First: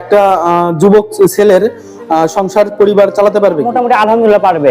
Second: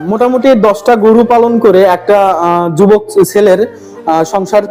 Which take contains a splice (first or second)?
first